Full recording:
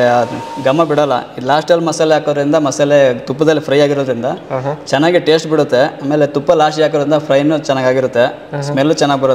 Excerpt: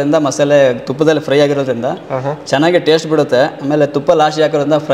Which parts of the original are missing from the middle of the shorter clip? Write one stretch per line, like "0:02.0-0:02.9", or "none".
none